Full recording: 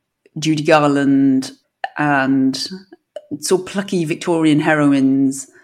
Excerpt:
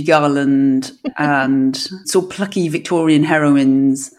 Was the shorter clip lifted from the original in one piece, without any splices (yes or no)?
no